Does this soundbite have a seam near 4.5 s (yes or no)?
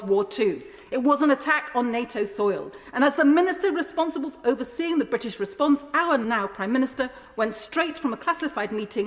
no